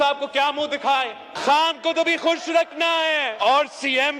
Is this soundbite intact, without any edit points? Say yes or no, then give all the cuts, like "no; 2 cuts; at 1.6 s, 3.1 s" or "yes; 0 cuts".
no; 2 cuts; at 1.3 s, 3.3 s